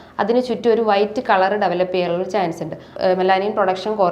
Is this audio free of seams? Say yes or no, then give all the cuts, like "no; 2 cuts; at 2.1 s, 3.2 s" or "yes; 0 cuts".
no; 1 cut; at 2.9 s